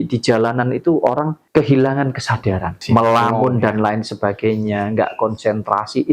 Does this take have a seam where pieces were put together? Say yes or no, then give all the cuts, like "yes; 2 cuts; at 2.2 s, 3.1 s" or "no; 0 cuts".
yes; 2 cuts; at 1.4 s, 2.8 s